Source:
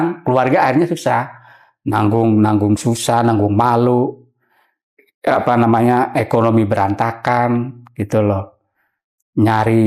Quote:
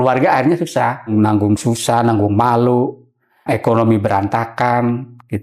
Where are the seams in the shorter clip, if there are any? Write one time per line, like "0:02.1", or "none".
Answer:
0:01.1
0:03.4